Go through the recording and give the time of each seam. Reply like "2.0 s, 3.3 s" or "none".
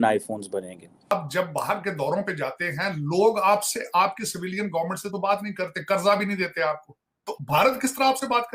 1.1 s, 7.3 s

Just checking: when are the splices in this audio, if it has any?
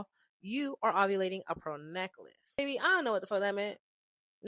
2.6 s

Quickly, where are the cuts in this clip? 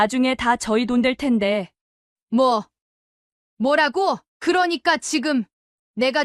1.7 s, 4.3 s

